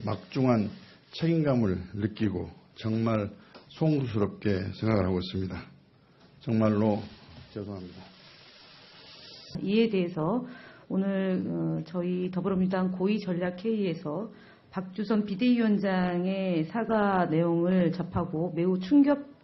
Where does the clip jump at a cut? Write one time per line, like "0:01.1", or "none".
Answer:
none